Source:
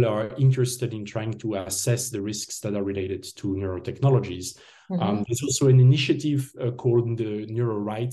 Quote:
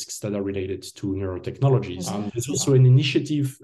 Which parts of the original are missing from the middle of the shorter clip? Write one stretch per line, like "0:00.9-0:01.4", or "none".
0:04.4-0:05.0